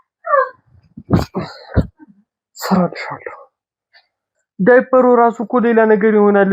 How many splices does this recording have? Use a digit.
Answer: 1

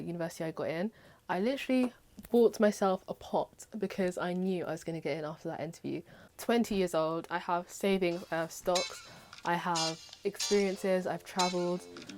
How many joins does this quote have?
1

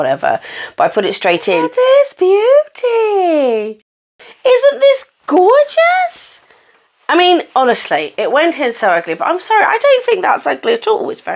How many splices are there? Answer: 1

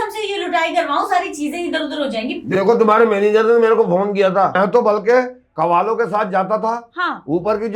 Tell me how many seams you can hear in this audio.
1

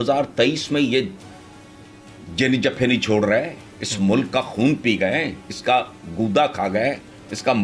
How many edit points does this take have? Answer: 0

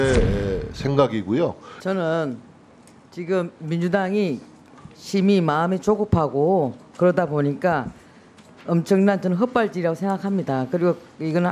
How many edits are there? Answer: 1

